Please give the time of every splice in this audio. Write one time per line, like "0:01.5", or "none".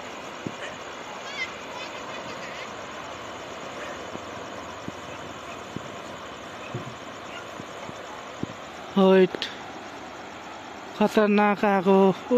none